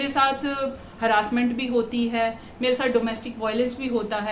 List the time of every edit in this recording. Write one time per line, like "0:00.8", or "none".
none